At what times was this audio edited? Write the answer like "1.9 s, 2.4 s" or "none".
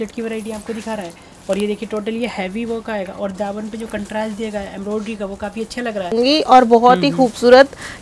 6.1 s